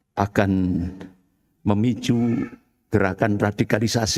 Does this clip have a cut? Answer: no; 0 cuts

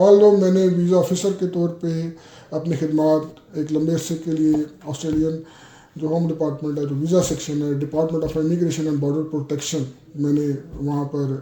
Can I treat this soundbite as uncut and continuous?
yes; 0 cuts

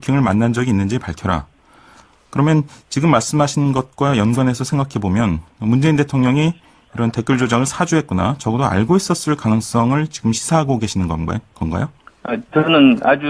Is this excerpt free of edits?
yes; 0 cuts

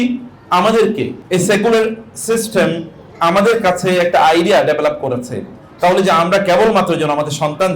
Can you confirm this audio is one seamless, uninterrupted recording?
no; 1 cut; at 1.2 s

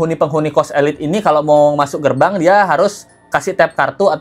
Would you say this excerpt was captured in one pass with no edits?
yes; 0 cuts

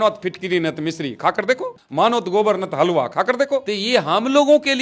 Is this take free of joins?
no; 2 cuts; at 1.8 s, 3.7 s

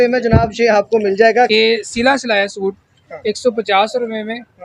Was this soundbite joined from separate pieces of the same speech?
yes; 1 cut; at 1.5 s

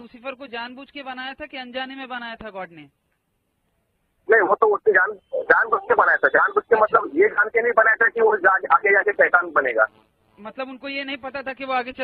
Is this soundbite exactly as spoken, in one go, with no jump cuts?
yes; 0 cuts

